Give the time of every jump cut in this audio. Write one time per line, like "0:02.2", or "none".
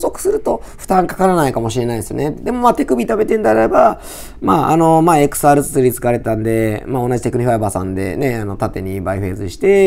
none